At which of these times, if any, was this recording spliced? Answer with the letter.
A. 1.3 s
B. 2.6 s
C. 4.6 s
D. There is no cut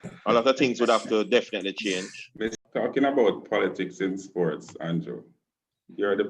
B